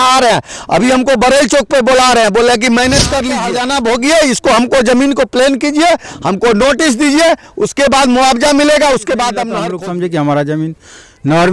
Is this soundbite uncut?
no; 2 cuts; at 3.5 s, 9.5 s

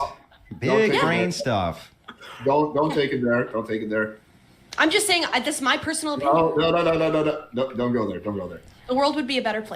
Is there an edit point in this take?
yes; 1 cut; at 7.4 s

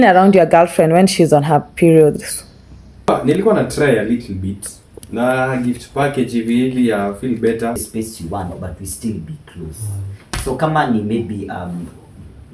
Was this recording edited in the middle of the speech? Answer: yes; 2 cuts; at 3.1 s, 7.9 s

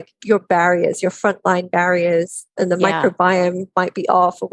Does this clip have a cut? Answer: yes; 1 cut; at 2.5 s

